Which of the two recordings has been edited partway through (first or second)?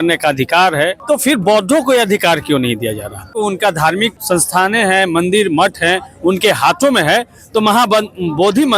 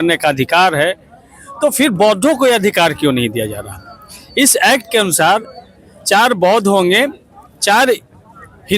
first